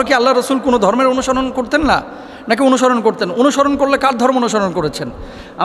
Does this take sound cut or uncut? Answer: uncut